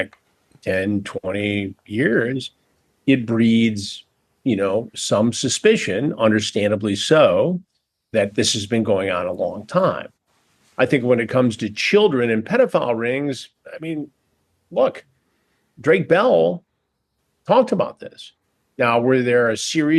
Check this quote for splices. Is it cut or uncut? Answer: uncut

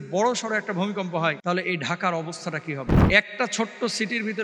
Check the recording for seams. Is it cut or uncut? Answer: cut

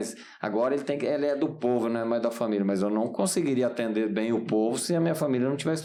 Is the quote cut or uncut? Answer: uncut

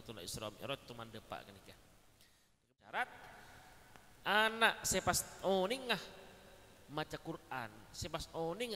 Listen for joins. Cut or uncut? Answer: cut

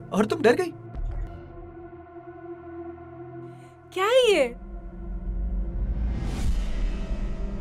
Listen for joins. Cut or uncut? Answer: cut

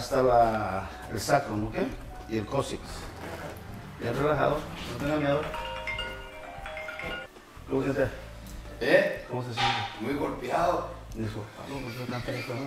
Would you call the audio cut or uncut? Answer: cut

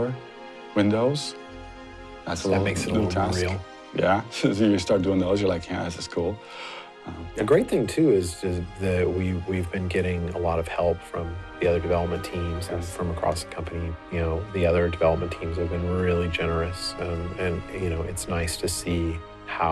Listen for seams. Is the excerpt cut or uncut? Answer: uncut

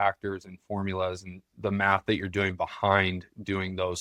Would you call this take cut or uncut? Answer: uncut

